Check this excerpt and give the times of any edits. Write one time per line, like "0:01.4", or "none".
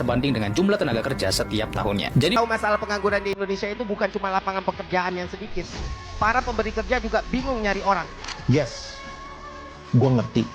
0:02.4

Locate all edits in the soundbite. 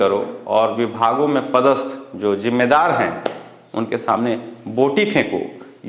none

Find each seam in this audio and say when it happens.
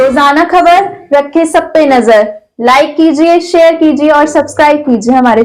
none

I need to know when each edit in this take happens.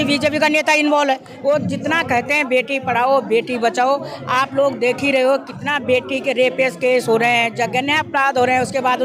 0:01.3

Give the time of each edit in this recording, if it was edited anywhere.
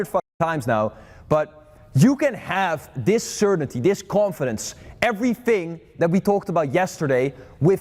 none

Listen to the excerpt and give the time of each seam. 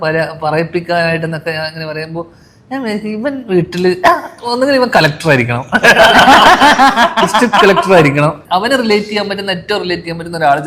0:08.4

